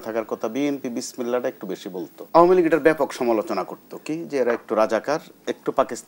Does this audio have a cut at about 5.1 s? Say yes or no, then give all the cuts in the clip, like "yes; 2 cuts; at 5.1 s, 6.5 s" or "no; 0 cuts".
no; 1 cut; at 2.2 s